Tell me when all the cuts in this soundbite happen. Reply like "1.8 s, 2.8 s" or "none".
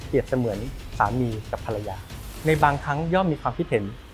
none